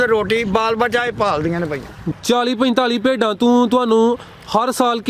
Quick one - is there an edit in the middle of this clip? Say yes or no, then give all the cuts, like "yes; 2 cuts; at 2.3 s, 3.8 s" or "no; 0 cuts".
yes; 1 cut; at 2.1 s